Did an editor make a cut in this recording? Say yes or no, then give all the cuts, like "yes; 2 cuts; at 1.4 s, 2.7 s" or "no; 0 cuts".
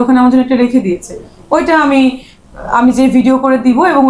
no; 0 cuts